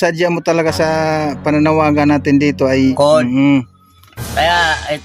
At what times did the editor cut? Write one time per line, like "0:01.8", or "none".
0:02.9